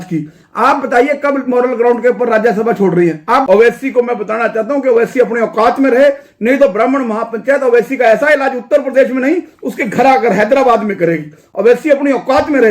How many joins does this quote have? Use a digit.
1